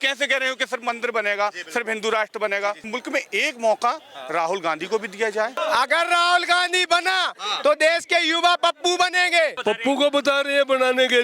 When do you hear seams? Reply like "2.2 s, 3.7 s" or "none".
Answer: 2.9 s, 5.6 s, 9.6 s